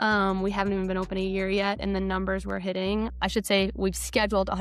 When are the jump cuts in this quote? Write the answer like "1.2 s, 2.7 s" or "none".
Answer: 3.1 s